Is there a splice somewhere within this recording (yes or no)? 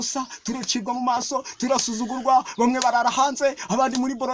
no